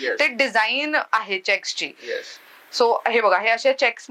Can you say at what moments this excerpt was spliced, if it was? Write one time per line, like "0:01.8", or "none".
none